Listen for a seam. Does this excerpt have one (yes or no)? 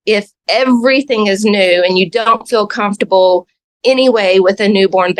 no